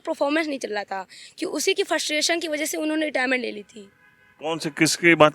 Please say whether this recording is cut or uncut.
uncut